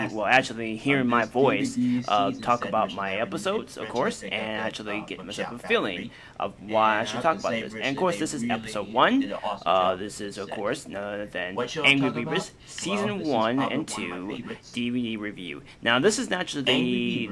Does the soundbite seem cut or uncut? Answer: uncut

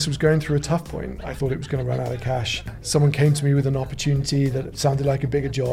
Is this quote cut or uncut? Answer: cut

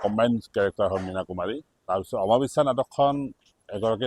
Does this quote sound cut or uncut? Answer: cut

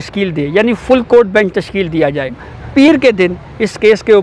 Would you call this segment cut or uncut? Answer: cut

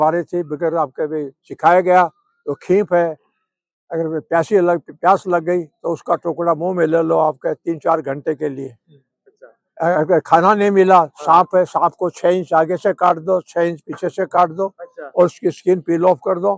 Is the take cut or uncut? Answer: uncut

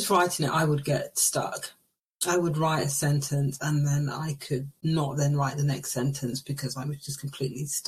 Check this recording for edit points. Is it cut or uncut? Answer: uncut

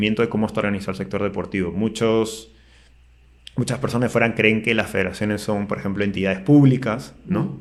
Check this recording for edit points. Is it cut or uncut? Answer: uncut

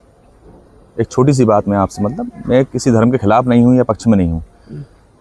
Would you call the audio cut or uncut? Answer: uncut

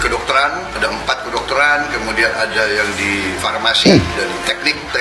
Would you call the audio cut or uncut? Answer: uncut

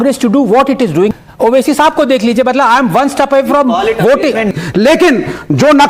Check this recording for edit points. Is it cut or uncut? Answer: cut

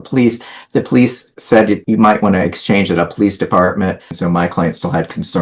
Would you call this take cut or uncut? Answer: cut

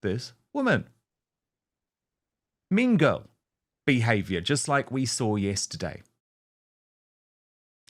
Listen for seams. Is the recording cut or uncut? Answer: uncut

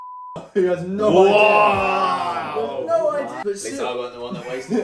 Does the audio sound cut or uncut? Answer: cut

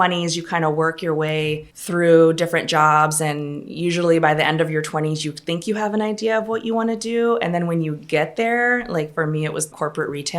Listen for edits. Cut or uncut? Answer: cut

